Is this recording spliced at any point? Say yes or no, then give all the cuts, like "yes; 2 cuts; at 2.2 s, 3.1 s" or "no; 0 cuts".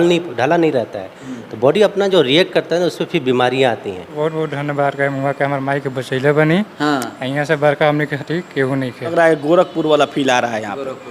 yes; 2 cuts; at 4.1 s, 9.1 s